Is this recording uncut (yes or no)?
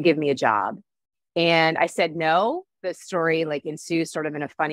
yes